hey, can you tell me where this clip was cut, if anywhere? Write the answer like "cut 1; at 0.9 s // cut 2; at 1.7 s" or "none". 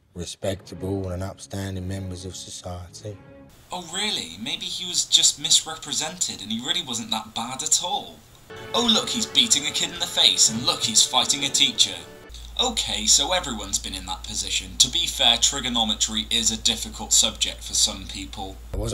none